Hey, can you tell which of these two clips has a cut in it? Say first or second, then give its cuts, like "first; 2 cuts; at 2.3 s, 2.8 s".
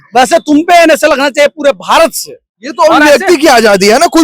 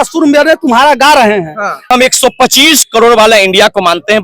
second; 1 cut; at 1.9 s